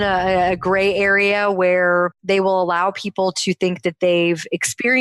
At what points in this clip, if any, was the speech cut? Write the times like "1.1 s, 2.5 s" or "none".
2.2 s